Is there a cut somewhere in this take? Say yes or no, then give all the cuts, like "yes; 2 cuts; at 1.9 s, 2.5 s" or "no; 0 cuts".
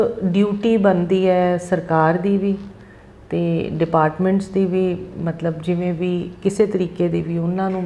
no; 0 cuts